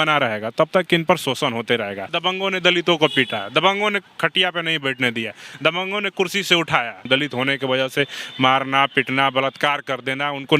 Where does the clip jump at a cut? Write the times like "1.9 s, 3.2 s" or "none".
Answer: 2.1 s, 7.0 s